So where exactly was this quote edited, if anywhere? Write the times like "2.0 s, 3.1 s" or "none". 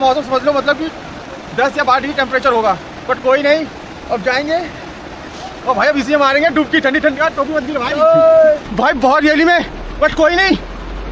8.7 s